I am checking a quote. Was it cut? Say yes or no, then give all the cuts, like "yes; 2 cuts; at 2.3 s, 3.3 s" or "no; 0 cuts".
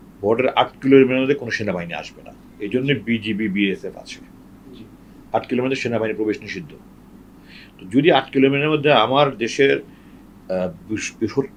no; 0 cuts